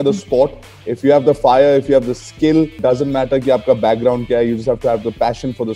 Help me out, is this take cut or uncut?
cut